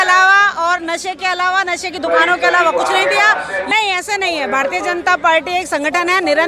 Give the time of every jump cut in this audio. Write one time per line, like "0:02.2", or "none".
0:03.6